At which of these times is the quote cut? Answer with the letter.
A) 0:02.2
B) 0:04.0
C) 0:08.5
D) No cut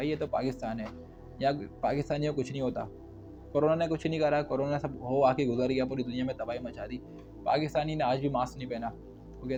D